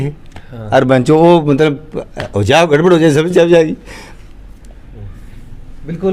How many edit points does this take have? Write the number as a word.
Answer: zero